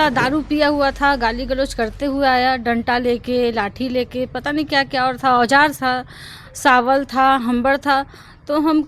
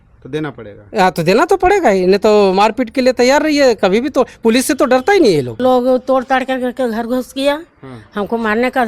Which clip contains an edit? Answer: second; 1 cut; at 5.6 s

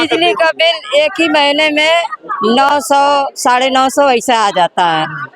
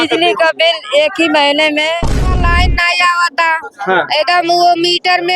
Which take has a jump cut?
second; 1 cut; at 2.4 s

